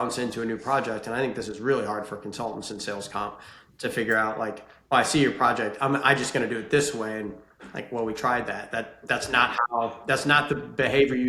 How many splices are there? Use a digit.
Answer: 0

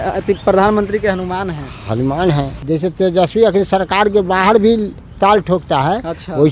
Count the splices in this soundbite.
1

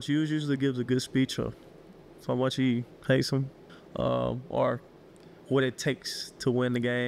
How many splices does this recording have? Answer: 0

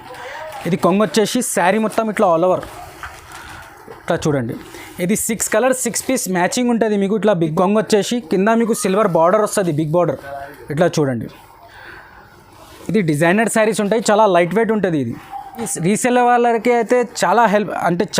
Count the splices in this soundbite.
2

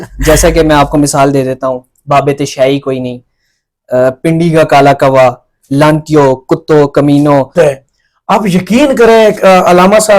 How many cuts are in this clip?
1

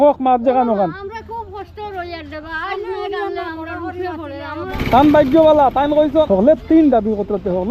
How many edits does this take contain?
2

